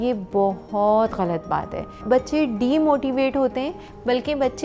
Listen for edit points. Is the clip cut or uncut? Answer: cut